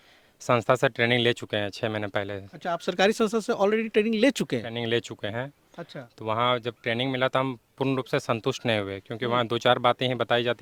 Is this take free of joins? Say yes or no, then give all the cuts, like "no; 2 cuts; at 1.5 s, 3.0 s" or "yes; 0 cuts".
yes; 0 cuts